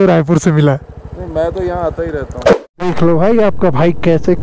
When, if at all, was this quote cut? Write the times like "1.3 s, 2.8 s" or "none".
2.5 s